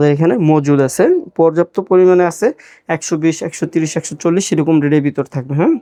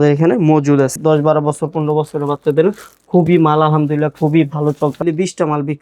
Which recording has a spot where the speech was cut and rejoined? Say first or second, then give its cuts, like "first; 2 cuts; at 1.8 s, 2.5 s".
second; 2 cuts; at 0.9 s, 5.0 s